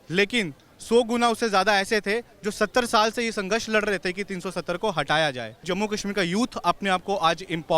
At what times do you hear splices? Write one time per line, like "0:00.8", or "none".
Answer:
0:05.6